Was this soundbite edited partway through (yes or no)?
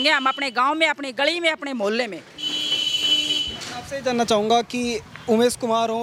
no